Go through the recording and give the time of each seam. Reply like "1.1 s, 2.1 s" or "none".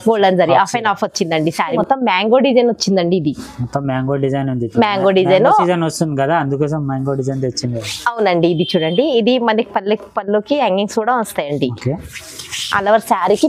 1.7 s